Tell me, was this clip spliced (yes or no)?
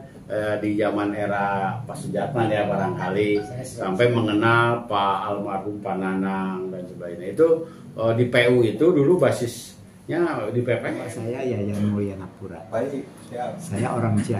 yes